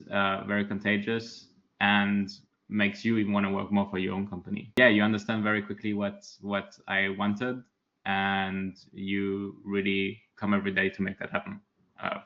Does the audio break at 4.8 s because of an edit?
yes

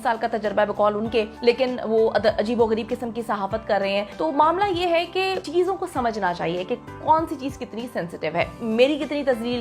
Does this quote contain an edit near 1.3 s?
yes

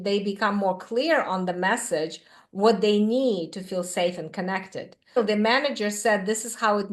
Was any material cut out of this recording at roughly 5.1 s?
yes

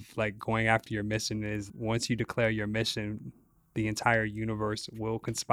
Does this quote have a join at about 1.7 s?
yes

